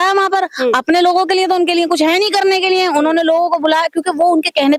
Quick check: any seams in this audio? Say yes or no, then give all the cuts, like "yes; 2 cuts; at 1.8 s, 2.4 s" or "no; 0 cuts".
no; 0 cuts